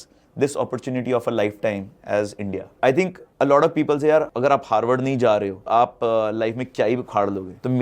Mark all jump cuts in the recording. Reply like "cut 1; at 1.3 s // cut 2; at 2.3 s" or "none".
cut 1; at 2.7 s